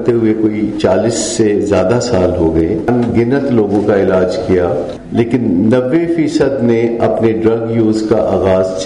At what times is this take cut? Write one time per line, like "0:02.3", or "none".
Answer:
0:02.9
0:05.0

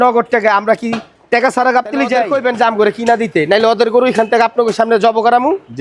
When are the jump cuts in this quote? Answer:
0:02.2

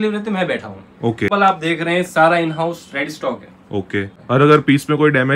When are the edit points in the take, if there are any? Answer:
0:01.3
0:04.1

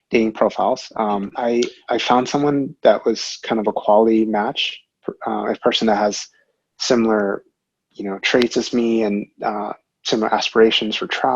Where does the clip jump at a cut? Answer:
0:01.3

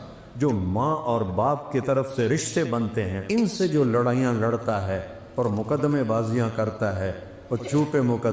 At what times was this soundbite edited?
0:03.2

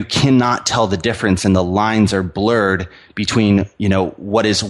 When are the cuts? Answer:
none

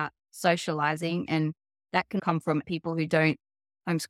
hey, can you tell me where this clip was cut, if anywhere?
0:02.4

